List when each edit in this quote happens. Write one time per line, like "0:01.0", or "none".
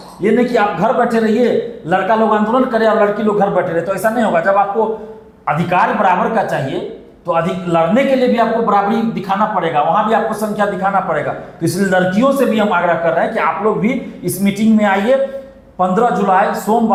none